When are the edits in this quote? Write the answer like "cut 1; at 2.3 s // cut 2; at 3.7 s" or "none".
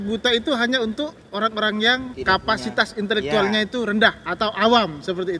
cut 1; at 2.1 s